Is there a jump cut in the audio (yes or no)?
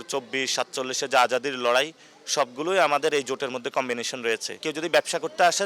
yes